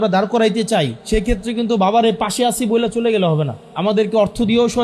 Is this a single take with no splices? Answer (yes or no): no